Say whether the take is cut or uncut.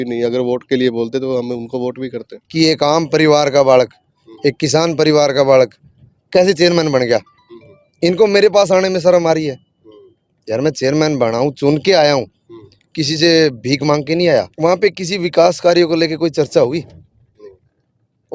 cut